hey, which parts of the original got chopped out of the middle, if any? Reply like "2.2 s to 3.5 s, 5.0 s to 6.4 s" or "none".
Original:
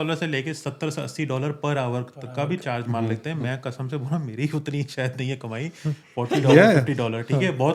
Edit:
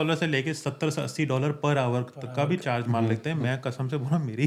none

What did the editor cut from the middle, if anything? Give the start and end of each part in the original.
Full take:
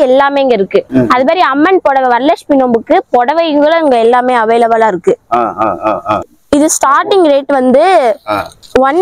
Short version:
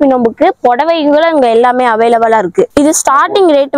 5.2 s to 6.5 s

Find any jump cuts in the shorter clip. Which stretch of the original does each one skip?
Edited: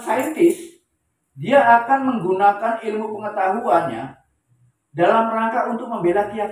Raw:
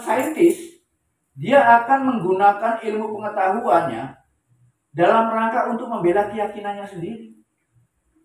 none

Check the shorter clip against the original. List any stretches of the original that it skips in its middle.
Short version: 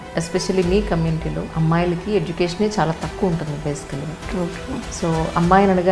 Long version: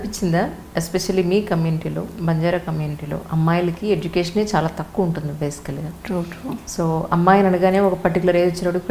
2.1 s to 3.2 s

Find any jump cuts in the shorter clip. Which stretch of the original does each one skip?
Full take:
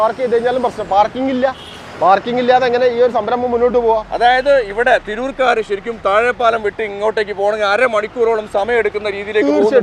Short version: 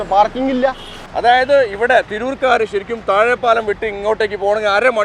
1.9 s to 4.1 s

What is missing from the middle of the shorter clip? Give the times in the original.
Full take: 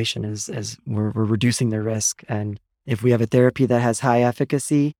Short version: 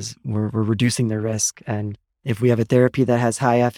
none

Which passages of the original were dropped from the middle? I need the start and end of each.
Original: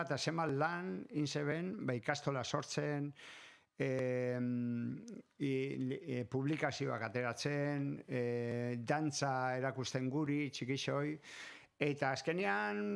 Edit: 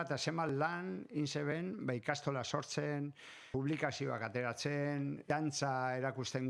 3.5 s to 6.3 s, 8.0 s to 8.8 s

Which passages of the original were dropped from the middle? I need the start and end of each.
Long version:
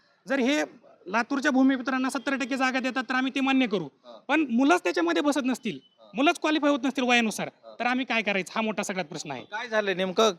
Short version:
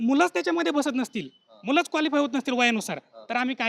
none

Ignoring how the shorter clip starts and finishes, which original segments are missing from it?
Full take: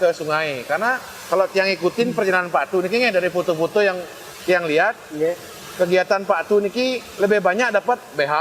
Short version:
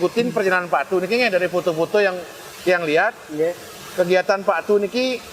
none

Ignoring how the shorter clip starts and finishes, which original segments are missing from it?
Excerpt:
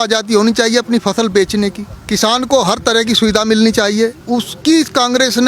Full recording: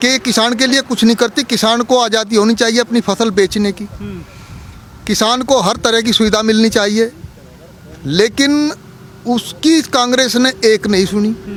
3.9 s to 4.9 s, 7.2 s to 9.2 s

